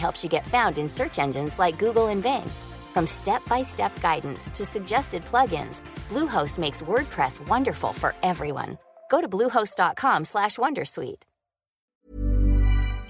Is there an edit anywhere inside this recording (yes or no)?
yes